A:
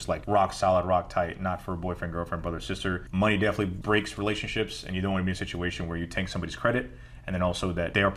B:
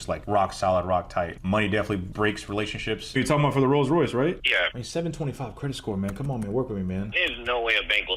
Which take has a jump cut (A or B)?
B